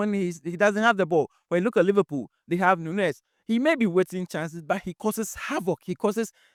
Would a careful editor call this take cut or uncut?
uncut